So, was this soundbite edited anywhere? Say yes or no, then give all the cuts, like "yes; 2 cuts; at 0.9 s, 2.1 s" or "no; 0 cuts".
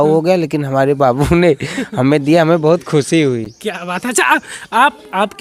no; 0 cuts